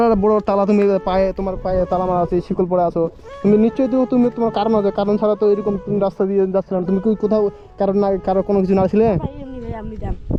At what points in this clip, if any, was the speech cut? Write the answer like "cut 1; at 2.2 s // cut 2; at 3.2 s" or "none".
none